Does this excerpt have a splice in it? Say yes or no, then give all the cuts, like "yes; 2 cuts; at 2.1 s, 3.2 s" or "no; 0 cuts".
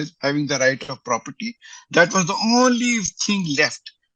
no; 0 cuts